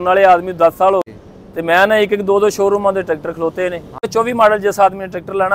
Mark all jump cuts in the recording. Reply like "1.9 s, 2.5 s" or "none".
1.1 s, 4.1 s